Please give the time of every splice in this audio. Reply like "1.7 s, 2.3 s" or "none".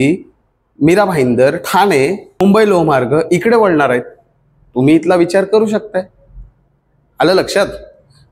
2.3 s

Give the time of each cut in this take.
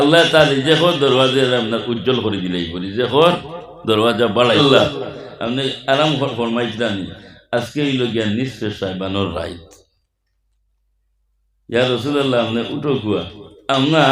4.6 s

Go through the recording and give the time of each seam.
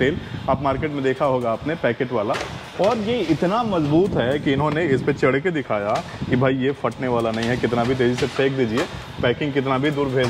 none

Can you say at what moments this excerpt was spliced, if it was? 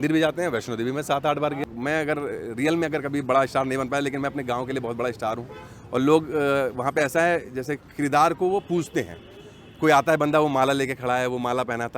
1.7 s

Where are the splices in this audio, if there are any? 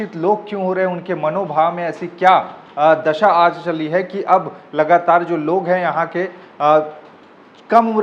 none

